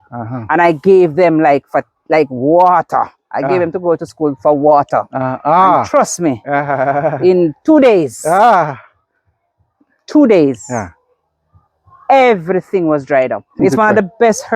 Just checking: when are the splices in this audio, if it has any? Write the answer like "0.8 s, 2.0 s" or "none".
13.6 s